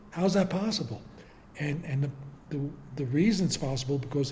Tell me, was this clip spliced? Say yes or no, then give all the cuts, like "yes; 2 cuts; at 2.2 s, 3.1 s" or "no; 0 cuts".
no; 0 cuts